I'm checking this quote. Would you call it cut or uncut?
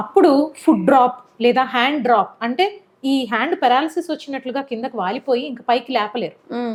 uncut